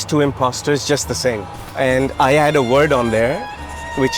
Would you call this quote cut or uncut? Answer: cut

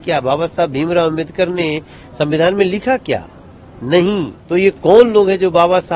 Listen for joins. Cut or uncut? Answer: cut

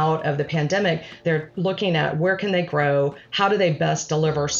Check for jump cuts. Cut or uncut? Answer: cut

